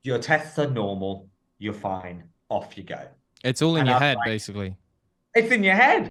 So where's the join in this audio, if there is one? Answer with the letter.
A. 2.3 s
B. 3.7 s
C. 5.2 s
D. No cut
D